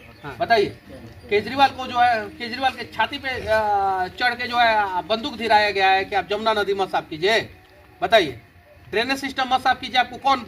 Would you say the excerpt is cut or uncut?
uncut